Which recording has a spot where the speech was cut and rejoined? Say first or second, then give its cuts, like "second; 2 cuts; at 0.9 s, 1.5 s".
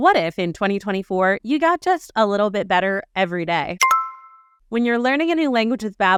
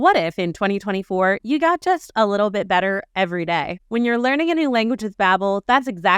second; 1 cut; at 3.7 s